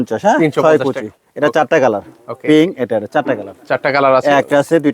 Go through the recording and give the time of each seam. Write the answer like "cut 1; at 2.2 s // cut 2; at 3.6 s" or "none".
none